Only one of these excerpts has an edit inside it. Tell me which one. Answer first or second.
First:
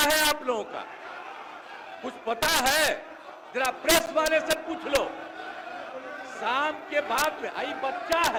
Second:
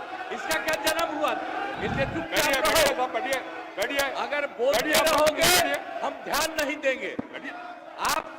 second